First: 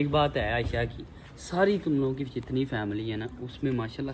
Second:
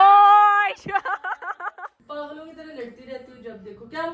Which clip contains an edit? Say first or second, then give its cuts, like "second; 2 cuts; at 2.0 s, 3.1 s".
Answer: second; 1 cut; at 2.0 s